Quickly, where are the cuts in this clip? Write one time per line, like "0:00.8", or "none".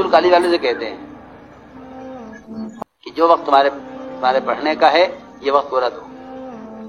none